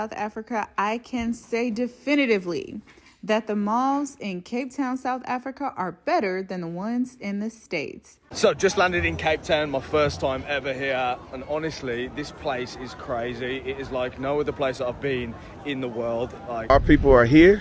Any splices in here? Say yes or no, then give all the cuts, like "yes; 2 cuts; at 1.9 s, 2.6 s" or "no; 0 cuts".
yes; 2 cuts; at 8.2 s, 16.7 s